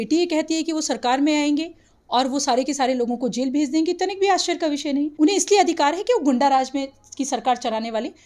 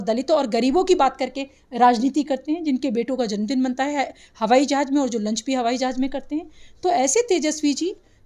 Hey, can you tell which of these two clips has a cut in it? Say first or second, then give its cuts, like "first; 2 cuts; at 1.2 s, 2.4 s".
first; 1 cut; at 5.1 s